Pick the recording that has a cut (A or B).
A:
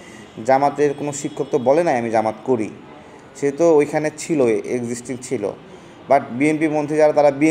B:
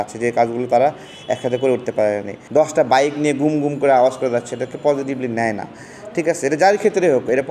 B